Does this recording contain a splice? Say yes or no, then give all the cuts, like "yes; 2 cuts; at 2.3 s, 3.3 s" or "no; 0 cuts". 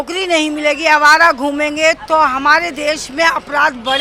no; 0 cuts